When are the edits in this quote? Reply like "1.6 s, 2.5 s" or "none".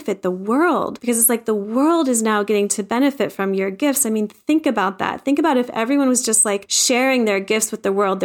none